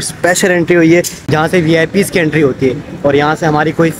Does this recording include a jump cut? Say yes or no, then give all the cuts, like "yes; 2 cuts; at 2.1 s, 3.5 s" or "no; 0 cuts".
yes; 1 cut; at 1.3 s